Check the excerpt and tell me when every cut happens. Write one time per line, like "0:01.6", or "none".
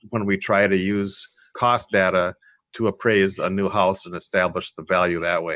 none